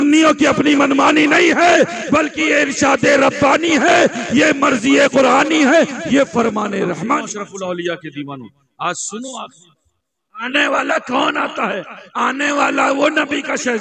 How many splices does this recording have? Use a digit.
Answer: 1